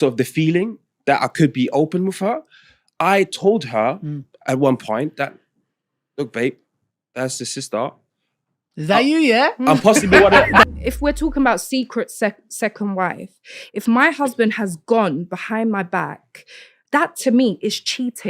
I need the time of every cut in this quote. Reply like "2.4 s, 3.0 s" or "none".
10.6 s

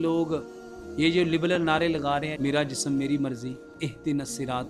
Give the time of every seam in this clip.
2.3 s, 3.8 s

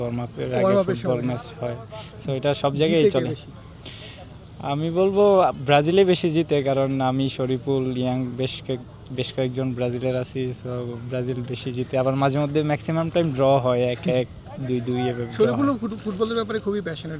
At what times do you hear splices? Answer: none

